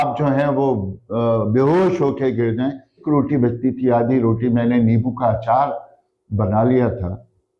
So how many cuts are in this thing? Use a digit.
1